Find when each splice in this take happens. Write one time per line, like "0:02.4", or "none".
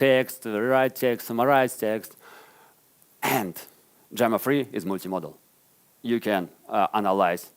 none